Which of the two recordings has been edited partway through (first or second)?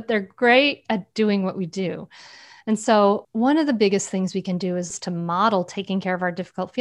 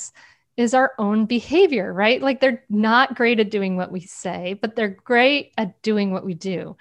first